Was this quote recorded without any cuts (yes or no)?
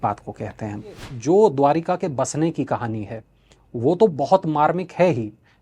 no